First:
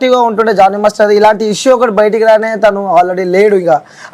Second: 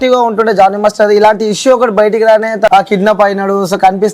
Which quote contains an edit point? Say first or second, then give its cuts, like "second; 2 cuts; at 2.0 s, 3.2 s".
second; 1 cut; at 2.7 s